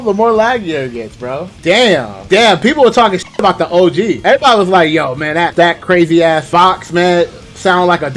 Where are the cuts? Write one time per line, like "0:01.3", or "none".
0:01.5
0:02.1